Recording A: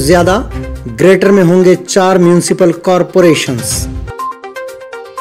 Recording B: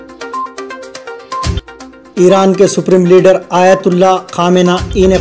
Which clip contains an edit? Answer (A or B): B